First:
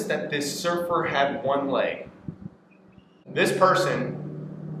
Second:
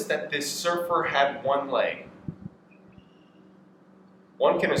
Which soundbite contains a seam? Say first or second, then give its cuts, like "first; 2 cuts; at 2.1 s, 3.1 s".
first; 1 cut; at 3.2 s